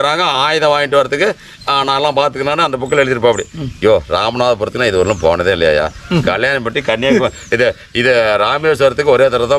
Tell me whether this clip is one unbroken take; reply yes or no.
yes